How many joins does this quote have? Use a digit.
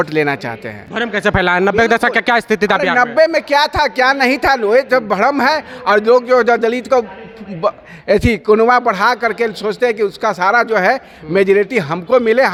0